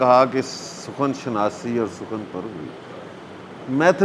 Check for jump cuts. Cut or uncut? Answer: uncut